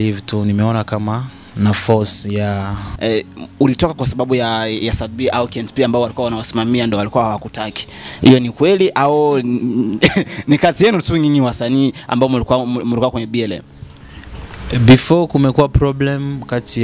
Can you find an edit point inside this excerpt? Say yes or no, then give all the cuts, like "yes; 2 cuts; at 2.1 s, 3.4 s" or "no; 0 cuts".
yes; 1 cut; at 2.9 s